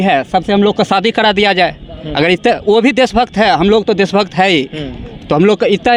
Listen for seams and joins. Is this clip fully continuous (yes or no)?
yes